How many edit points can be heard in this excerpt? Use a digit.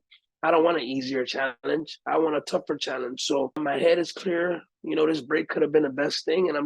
1